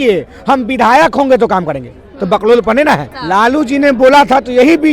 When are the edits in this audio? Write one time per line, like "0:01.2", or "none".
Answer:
0:03.1